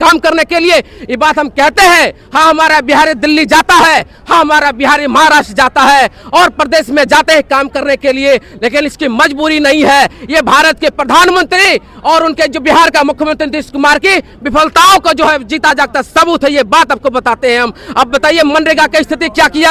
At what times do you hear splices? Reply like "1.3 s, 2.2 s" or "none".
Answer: none